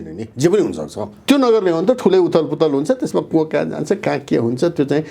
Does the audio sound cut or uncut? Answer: cut